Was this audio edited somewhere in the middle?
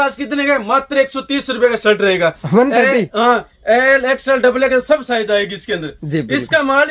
no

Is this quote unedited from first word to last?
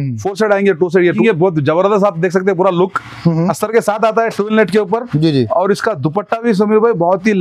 no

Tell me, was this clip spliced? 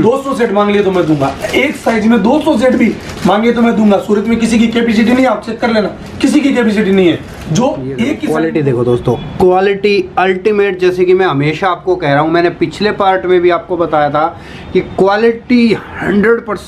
yes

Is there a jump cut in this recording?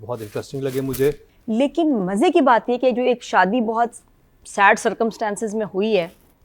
yes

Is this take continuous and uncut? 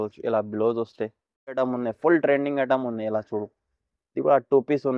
no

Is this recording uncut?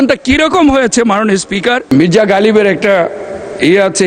no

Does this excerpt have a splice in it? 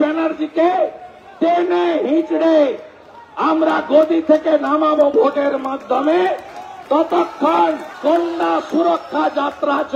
yes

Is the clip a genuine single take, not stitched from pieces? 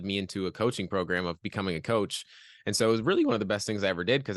yes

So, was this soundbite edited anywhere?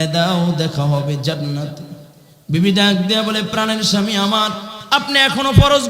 yes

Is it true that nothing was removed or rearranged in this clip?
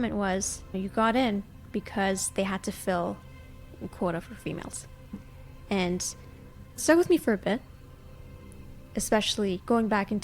no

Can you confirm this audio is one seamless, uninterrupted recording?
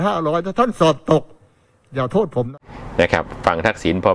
no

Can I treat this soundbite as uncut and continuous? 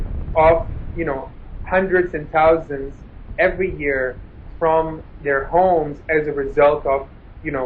yes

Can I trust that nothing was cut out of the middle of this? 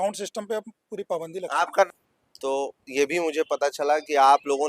no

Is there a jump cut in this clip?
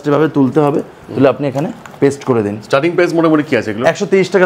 no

